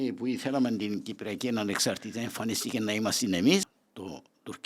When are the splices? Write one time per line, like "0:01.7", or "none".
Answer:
0:03.7